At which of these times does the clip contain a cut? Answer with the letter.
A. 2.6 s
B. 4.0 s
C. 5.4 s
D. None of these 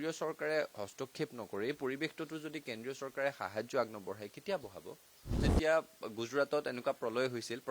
C